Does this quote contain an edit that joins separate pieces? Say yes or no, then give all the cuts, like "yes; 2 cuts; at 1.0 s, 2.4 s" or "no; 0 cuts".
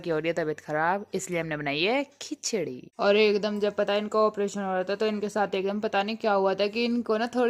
yes; 1 cut; at 2.8 s